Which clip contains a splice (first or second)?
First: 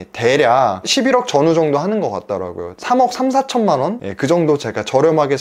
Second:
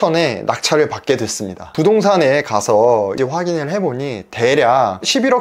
second